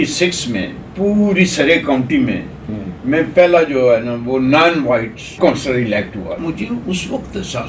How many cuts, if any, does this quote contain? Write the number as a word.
two